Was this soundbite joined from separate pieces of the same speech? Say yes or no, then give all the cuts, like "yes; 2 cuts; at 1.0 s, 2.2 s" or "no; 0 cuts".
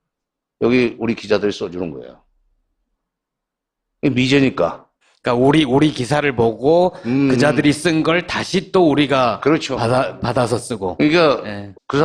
yes; 1 cut; at 10.7 s